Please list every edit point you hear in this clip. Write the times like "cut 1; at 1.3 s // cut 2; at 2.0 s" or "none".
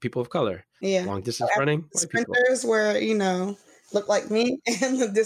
none